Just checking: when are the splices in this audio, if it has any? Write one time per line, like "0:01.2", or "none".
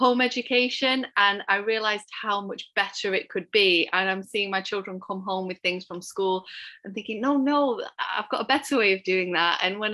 none